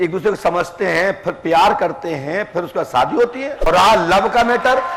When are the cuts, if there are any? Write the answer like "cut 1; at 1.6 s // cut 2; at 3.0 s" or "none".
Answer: cut 1; at 3.7 s